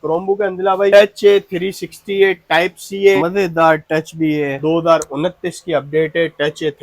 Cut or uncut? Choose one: cut